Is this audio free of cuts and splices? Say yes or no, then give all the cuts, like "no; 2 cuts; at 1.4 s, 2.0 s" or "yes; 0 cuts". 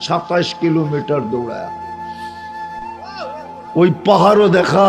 no; 2 cuts; at 1.7 s, 3.0 s